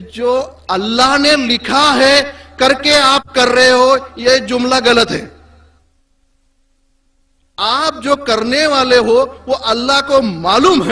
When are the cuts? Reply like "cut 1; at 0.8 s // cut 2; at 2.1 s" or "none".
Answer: none